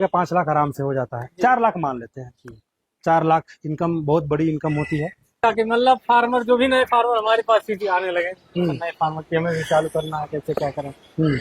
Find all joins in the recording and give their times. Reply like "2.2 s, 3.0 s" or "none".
5.4 s